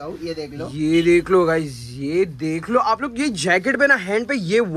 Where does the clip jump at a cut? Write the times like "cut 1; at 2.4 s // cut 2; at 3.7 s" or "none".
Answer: none